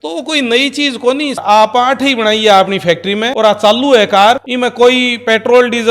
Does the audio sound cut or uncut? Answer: cut